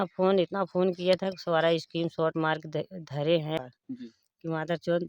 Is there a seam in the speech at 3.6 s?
yes; 1 cut; at 3.6 s

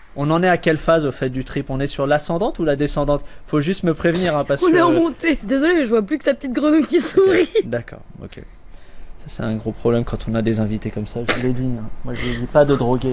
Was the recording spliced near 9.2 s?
no; 2 cuts; at 5.4 s, 7.7 s

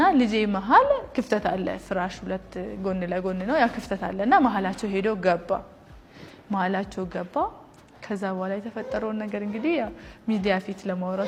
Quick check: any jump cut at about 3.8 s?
no; 0 cuts

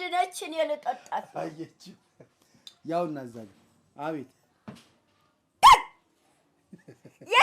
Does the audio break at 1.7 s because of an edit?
no; 0 cuts

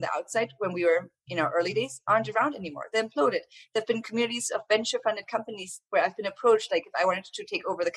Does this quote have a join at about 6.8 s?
no; 0 cuts

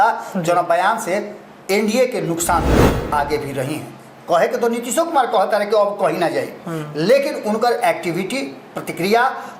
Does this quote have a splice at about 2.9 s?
yes; 1 cut; at 2.9 s

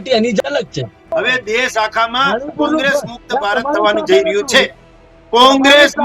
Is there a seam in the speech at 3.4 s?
no; 1 cut; at 1.1 s

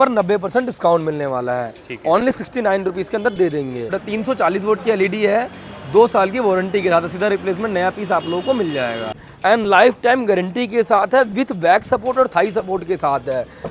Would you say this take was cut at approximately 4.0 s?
yes; 2 cuts; at 4.0 s, 9.3 s

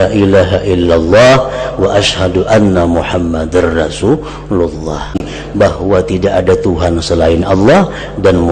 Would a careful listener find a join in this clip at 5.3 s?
yes; 1 cut; at 5.3 s

